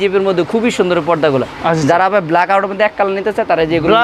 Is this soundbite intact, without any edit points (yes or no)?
yes